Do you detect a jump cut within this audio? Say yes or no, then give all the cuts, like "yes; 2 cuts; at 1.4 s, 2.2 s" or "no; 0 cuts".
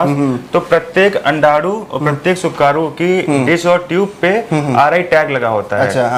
no; 0 cuts